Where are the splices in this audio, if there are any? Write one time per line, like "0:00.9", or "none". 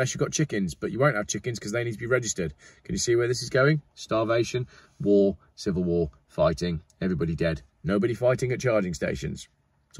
none